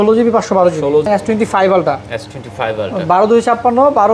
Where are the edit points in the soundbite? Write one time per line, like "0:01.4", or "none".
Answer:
0:01.1